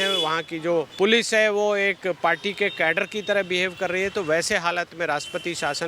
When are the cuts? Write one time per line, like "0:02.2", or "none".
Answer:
0:00.9